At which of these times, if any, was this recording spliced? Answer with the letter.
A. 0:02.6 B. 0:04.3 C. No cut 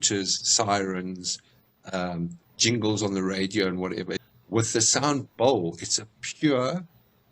B